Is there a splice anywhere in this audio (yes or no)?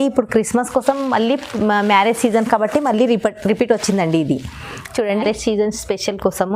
yes